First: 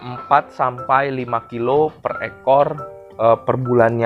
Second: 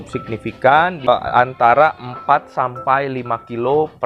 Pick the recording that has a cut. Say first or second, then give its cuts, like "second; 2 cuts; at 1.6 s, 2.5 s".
second; 1 cut; at 1.1 s